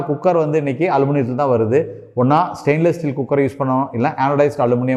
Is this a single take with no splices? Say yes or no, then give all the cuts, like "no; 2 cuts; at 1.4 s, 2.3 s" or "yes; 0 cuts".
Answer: yes; 0 cuts